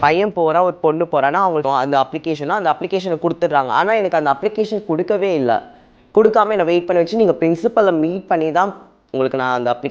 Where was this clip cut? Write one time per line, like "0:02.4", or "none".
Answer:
0:01.6